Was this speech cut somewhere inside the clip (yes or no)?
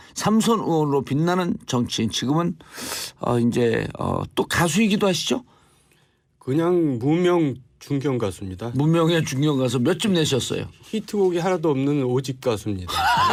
no